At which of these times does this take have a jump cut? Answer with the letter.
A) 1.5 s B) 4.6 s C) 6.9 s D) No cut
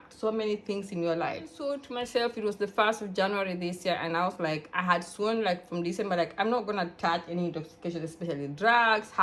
A